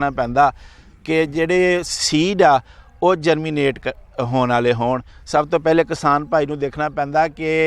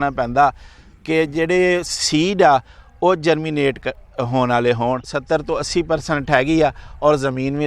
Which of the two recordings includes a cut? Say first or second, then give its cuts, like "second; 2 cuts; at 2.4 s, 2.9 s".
second; 1 cut; at 5.1 s